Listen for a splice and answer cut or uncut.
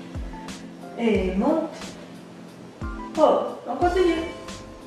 cut